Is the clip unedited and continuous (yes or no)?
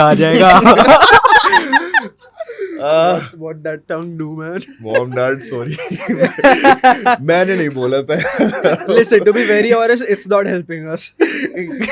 yes